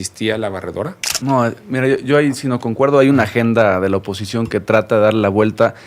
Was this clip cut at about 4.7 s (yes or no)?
no